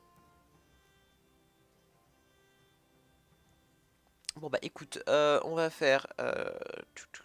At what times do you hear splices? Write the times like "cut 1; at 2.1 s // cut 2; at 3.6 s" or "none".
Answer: cut 1; at 3.7 s